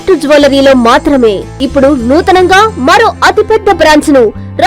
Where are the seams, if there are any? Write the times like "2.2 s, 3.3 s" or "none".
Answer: 1.6 s

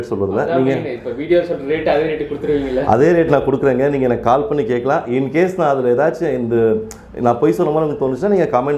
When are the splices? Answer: none

